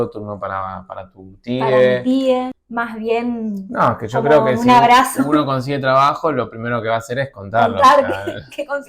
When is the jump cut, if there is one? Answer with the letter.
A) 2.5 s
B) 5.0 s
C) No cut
A